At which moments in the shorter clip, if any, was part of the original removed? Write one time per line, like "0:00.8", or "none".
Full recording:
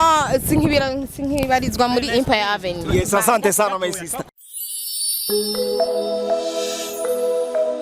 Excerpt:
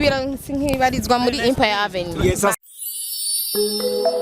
0:02.5